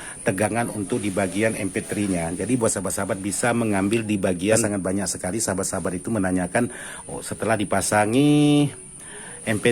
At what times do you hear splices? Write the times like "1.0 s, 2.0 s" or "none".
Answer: 4.7 s